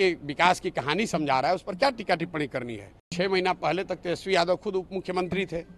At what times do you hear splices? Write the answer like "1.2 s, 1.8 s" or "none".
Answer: 3.1 s

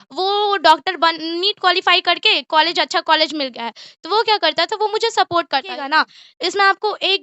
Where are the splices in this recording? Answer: 5.8 s

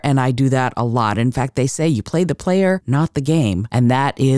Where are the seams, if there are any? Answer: 3.2 s

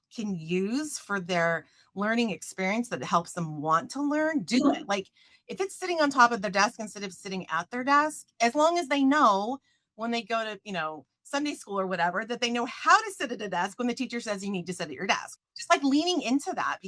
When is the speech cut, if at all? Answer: 15.3 s

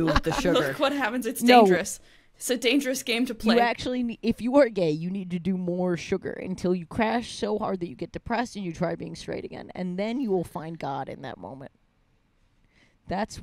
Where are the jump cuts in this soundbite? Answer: none

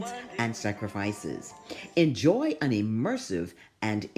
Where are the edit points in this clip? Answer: none

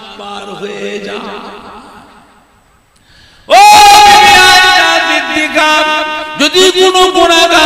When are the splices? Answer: none

